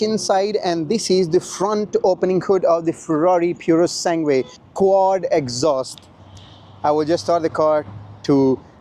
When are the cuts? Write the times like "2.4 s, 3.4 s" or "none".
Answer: 4.6 s